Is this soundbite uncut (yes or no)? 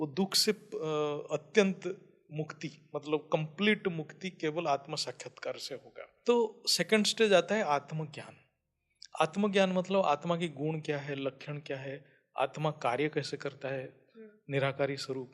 no